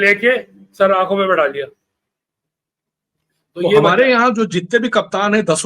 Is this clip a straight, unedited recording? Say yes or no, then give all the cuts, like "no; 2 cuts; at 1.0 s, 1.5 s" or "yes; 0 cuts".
no; 1 cut; at 3.8 s